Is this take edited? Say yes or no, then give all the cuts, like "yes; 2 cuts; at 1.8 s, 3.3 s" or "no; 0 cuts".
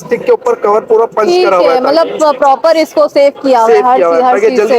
no; 0 cuts